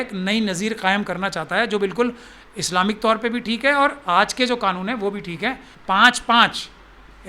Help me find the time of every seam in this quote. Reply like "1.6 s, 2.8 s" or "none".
5.7 s

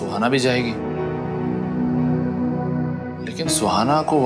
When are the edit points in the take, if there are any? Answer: none

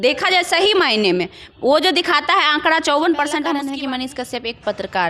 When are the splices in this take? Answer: 3.7 s

